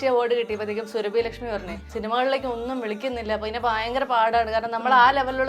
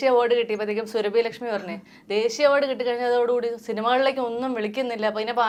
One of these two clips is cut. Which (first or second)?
first